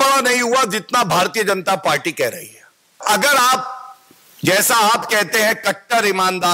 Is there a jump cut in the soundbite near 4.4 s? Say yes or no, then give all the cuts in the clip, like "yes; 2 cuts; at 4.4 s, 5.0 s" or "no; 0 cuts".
no; 1 cut; at 3.0 s